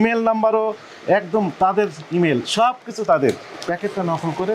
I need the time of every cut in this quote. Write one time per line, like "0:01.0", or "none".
0:03.5